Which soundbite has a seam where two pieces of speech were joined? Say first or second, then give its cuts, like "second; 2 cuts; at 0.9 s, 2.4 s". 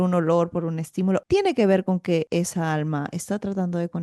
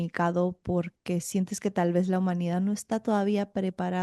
first; 2 cuts; at 1.2 s, 2.3 s